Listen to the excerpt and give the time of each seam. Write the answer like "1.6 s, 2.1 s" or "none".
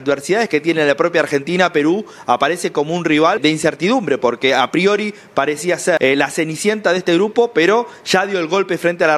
3.4 s, 6.0 s